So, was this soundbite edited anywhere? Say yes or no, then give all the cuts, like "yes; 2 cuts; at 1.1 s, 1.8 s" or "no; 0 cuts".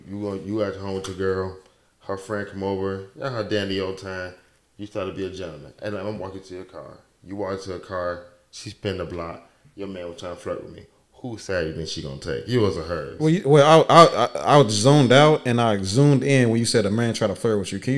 no; 0 cuts